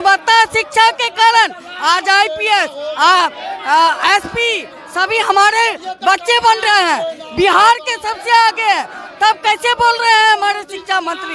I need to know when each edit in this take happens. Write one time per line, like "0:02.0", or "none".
none